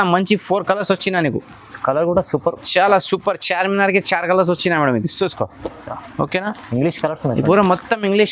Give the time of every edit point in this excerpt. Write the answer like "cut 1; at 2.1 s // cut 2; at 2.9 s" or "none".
none